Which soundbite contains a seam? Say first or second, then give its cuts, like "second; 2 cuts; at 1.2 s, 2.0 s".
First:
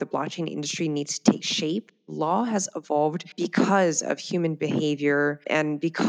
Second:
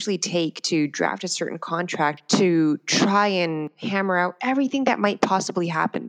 first; 1 cut; at 2.0 s